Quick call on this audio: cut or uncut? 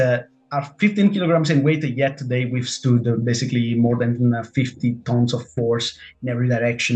uncut